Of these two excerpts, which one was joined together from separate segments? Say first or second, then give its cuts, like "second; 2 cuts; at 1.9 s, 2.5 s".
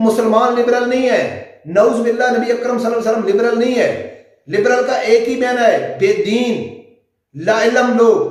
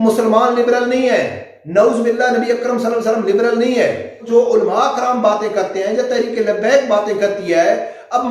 second; 1 cut; at 4.3 s